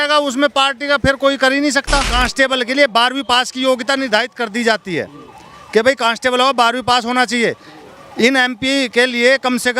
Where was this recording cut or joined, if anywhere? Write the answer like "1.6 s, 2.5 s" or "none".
2.1 s

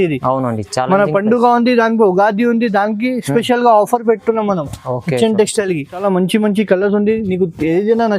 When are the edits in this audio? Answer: 6.0 s

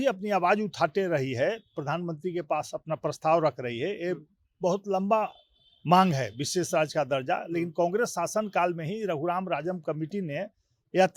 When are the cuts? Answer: none

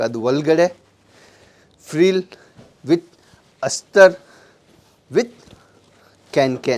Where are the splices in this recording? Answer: none

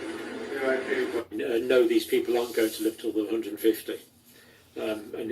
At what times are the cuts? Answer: 1.3 s

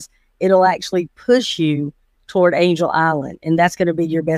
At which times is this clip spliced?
none

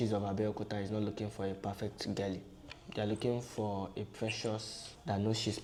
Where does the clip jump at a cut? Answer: none

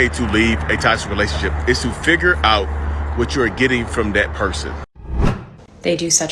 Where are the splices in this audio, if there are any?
5.2 s

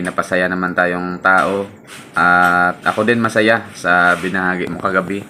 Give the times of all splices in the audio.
none

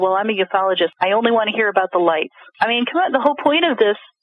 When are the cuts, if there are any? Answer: 0.9 s, 2.4 s

